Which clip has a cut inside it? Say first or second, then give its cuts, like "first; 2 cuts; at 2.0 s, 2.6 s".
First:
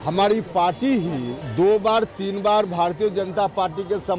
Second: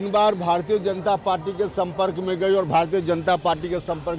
first; 1 cut; at 1.4 s